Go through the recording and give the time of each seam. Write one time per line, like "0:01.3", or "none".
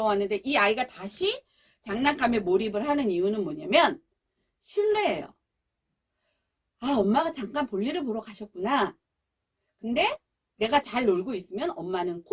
none